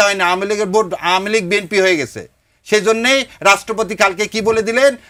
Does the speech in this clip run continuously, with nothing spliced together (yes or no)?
yes